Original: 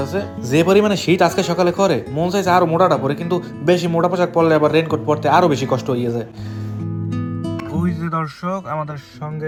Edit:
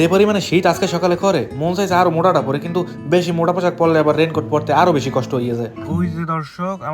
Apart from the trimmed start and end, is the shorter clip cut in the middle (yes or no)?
yes